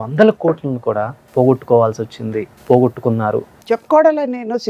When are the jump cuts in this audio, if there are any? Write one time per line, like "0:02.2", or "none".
0:01.2
0:02.5
0:03.5